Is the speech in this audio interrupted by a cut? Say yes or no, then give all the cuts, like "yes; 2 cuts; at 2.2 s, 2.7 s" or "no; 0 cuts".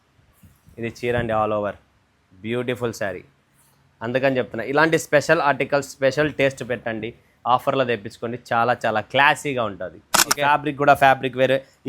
yes; 1 cut; at 10.3 s